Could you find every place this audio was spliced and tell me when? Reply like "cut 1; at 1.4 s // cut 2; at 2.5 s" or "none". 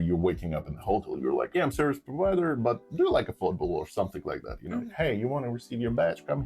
cut 1; at 1.5 s // cut 2; at 4.9 s